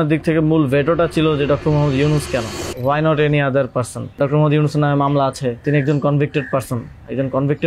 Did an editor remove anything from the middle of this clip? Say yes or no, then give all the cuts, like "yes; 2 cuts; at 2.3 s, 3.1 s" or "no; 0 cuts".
yes; 3 cuts; at 2.6 s, 4.2 s, 5.6 s